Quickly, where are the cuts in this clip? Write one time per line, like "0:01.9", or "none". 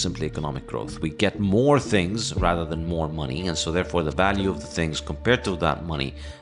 none